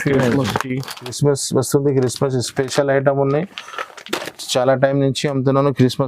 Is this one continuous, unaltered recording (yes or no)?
no